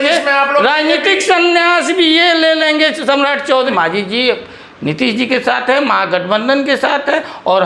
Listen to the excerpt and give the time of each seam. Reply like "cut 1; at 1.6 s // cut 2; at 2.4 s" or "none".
cut 1; at 3.7 s